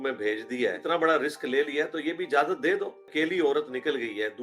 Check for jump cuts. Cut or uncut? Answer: cut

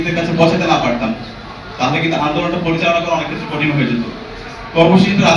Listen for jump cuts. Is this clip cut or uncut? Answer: uncut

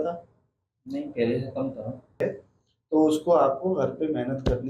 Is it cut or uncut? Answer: cut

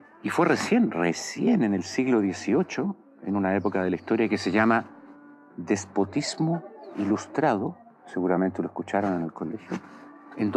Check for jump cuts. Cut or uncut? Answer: uncut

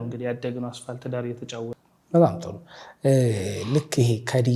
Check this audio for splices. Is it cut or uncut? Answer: cut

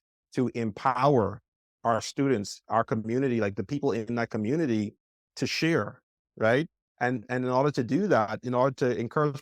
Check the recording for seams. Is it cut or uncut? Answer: uncut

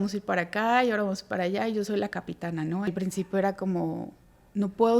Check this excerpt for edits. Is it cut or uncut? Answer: cut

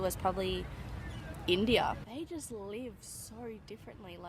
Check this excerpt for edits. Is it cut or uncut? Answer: uncut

